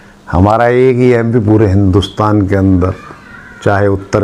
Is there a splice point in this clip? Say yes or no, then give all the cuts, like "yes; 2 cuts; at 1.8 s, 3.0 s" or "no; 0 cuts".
no; 0 cuts